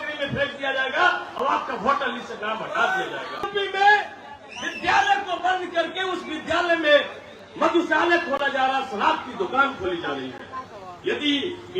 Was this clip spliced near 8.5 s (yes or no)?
no